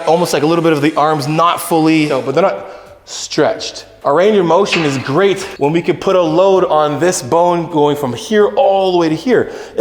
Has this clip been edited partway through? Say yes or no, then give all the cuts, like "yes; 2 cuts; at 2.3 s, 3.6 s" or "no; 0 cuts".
yes; 2 cuts; at 2.2 s, 3.9 s